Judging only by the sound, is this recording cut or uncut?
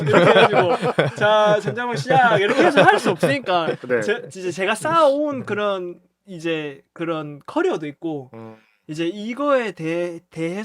uncut